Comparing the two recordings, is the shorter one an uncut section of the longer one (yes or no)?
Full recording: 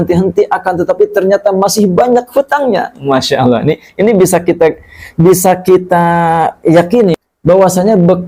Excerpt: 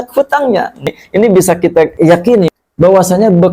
no